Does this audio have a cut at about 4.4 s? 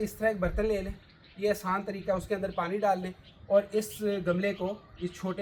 no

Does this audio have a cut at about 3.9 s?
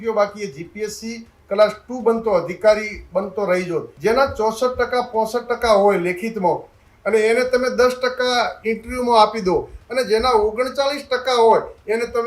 yes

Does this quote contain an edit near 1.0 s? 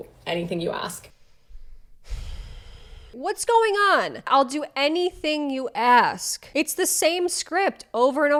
no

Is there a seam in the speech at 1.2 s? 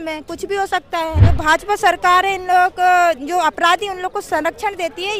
yes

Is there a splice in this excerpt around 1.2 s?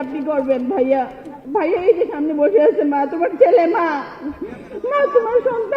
yes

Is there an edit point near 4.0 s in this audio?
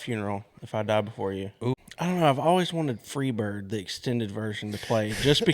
no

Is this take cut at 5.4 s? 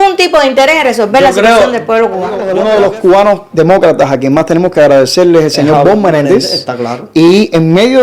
no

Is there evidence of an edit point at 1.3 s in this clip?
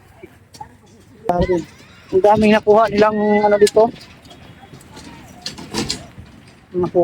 yes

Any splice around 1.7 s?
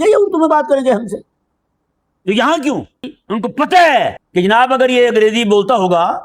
no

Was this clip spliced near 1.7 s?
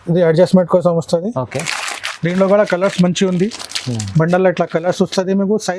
no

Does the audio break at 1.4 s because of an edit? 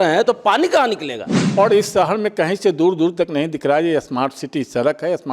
yes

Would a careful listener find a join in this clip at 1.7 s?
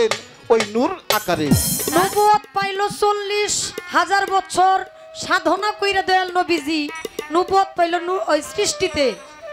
yes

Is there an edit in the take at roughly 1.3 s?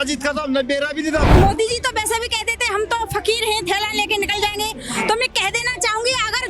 yes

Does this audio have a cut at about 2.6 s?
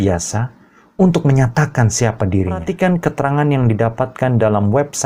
yes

